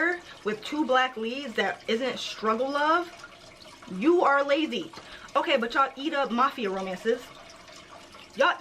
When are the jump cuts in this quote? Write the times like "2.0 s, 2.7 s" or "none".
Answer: 5.1 s